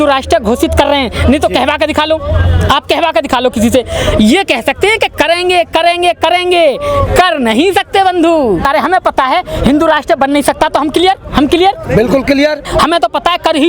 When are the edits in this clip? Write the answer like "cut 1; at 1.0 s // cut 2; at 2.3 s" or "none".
cut 1; at 8.6 s // cut 2; at 12.7 s